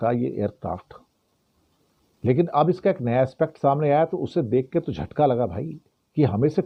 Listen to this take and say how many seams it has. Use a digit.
0